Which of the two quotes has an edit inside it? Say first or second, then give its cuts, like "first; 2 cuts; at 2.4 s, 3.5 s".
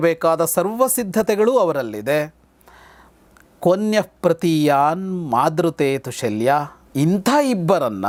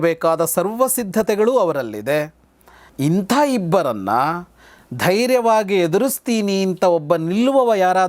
second; 1 cut; at 2.8 s